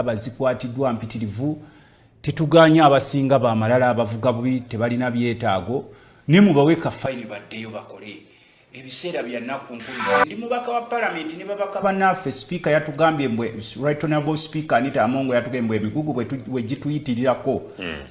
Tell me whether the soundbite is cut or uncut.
uncut